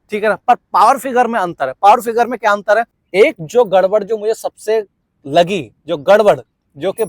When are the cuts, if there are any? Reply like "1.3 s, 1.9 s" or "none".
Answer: 3.0 s